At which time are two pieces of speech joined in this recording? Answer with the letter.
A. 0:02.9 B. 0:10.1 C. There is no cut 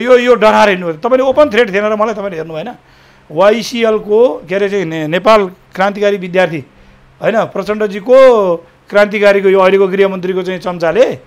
C